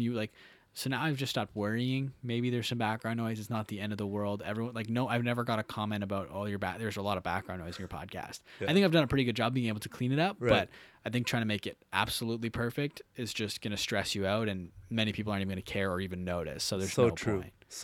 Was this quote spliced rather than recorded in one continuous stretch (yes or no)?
no